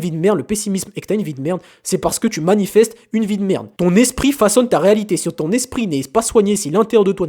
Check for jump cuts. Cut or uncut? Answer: uncut